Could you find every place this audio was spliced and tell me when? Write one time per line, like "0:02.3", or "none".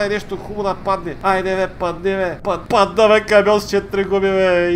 0:01.1
0:02.5